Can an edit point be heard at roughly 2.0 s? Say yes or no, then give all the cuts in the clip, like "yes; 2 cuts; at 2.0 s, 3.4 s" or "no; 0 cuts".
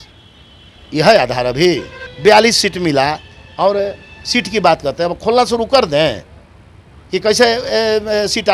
yes; 1 cut; at 2.0 s